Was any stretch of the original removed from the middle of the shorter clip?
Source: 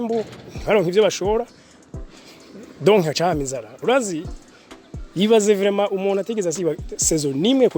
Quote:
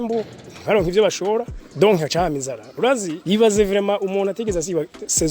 yes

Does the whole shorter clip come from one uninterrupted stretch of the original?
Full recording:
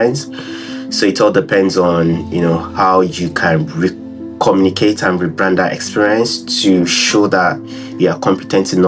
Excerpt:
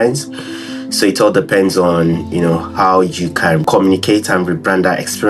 no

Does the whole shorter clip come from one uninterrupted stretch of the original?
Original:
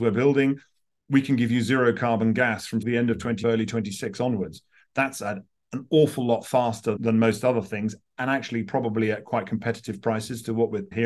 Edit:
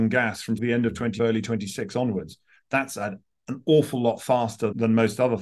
yes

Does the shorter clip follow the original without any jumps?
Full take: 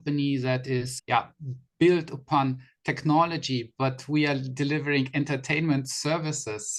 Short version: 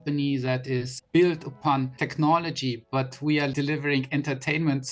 no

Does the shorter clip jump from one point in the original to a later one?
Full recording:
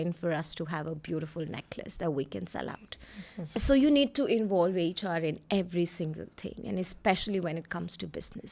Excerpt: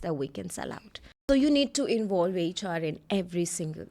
yes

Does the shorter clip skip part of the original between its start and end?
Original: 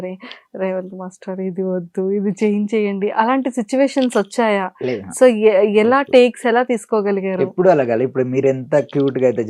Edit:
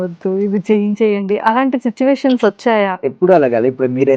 yes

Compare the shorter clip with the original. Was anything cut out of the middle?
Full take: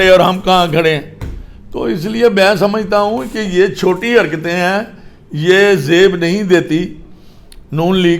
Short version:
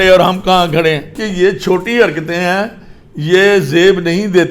yes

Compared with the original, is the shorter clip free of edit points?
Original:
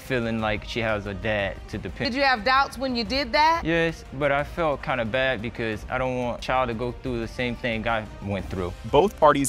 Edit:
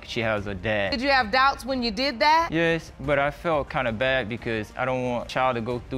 no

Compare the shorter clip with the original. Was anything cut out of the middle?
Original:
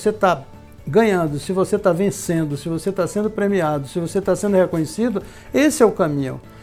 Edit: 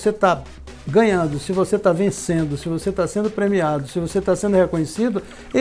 no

